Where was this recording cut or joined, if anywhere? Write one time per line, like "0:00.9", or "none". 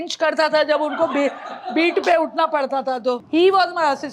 0:03.2